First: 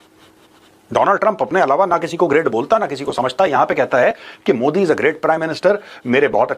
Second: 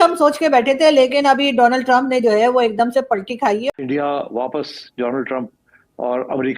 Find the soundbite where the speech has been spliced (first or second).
second